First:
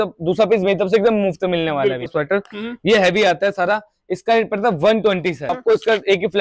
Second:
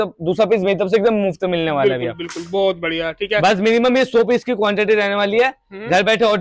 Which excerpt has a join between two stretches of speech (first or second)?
first